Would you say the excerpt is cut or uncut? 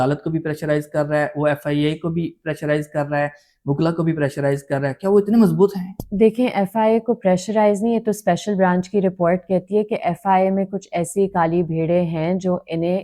uncut